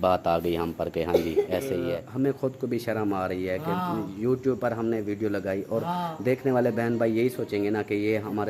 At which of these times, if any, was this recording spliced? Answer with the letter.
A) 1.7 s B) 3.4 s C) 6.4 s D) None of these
A